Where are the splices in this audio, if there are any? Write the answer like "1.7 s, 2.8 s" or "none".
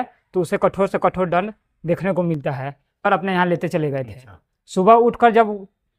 3.1 s